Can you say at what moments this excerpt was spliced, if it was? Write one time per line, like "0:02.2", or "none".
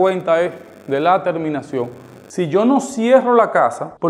0:02.3